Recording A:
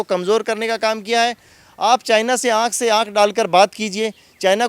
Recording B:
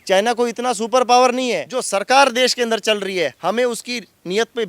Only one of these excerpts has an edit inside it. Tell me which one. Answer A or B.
B